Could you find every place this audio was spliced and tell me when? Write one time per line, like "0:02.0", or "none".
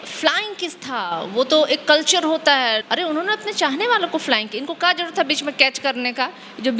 0:02.8